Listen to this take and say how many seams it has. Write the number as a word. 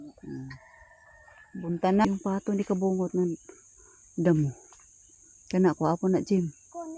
one